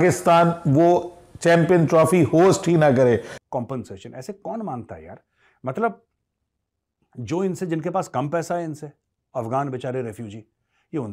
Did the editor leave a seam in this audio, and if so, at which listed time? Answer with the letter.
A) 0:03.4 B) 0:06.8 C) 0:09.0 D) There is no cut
A